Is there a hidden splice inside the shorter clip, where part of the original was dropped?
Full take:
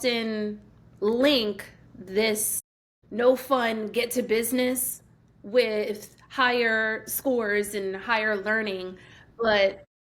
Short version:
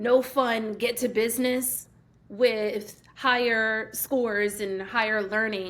no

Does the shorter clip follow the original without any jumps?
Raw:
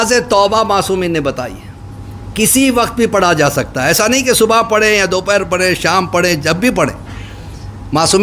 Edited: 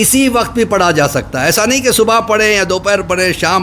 yes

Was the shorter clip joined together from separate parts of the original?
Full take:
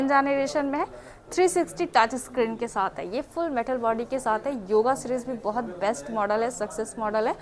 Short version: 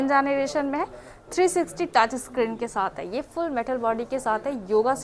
no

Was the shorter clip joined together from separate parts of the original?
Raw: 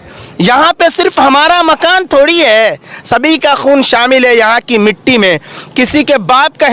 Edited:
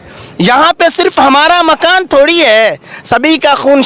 no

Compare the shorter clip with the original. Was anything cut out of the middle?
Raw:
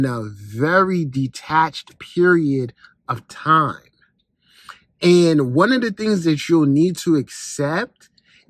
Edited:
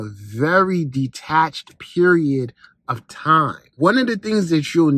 yes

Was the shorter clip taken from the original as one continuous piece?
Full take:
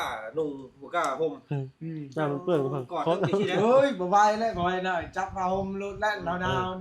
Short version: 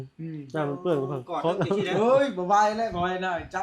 yes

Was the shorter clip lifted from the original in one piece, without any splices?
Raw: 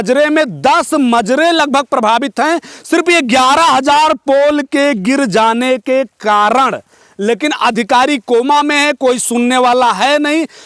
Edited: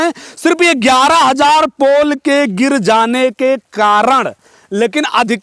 yes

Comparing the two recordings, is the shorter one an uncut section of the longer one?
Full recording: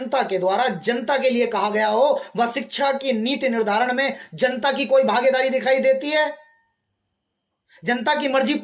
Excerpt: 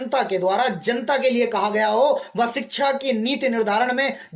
yes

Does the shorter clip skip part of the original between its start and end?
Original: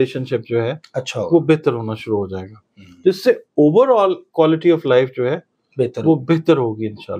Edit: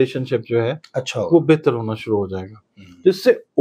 no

